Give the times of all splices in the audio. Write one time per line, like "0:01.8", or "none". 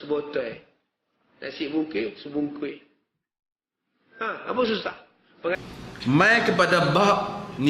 0:05.6